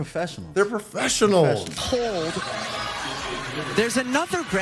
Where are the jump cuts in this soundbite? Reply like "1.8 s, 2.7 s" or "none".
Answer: 1.8 s

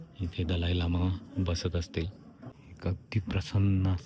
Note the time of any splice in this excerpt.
none

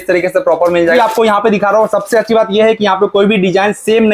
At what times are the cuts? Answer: 1.0 s

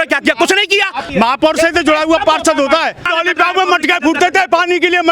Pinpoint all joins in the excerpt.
1.0 s, 3.0 s

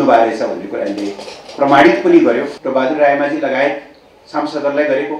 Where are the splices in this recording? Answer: 2.6 s

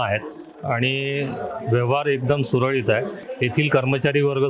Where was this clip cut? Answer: 3.2 s

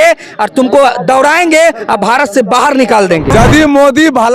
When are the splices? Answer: 3.3 s

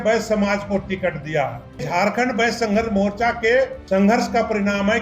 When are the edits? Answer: 1.8 s, 3.8 s

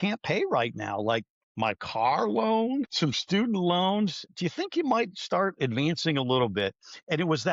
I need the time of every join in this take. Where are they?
1.4 s, 2.9 s, 4.3 s

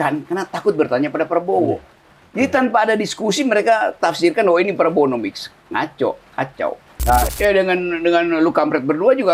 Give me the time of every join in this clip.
7.3 s

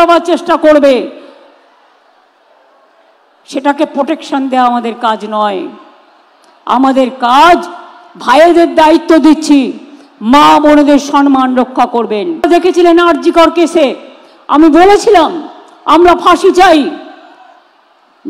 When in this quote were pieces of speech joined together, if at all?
12.4 s

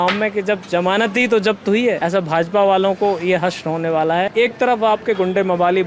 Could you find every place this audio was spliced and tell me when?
2.0 s, 4.3 s

